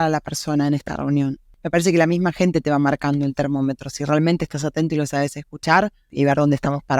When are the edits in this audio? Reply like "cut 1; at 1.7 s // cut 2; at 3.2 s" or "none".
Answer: cut 1; at 1.5 s // cut 2; at 6.1 s